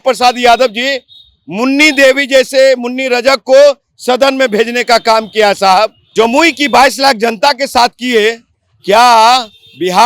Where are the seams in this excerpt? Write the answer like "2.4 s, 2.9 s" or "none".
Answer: 6.0 s